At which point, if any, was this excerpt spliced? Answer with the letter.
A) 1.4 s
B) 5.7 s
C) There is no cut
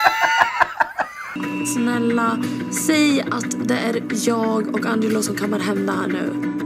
A